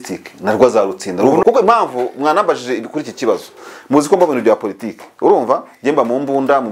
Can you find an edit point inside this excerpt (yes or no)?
yes